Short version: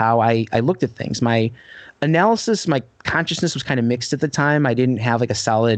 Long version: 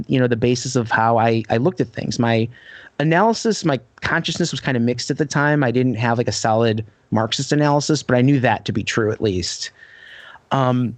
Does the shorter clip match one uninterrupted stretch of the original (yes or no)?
yes